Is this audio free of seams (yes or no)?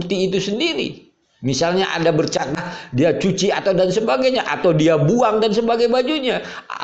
no